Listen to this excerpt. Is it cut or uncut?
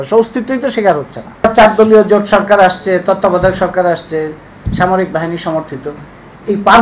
cut